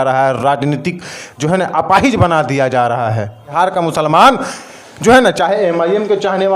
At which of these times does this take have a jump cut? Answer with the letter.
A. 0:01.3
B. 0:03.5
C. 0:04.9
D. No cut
B